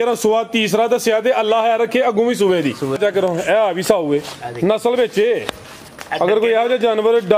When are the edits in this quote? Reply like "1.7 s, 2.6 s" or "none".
3.0 s

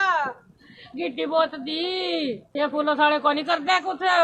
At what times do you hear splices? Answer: 2.4 s

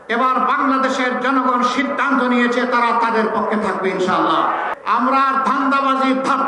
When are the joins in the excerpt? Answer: 4.7 s

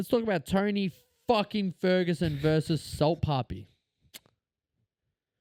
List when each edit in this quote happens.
none

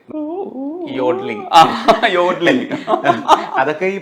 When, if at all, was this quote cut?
none

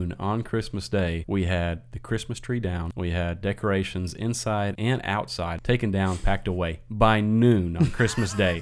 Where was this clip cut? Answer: 1.2 s, 2.9 s, 4.9 s

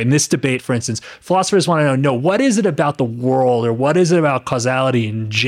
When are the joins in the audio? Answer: none

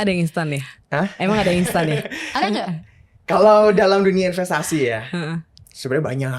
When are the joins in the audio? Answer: none

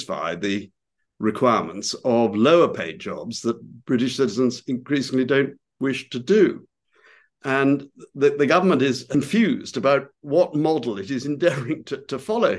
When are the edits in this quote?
9.1 s

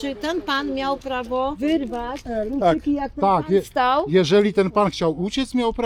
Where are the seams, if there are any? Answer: 1.6 s

